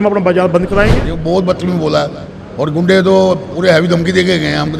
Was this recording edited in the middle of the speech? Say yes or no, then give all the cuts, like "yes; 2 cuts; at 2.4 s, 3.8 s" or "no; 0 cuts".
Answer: yes; 1 cut; at 1.1 s